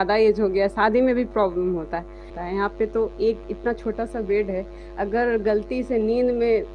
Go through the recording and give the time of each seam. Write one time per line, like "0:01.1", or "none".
0:02.3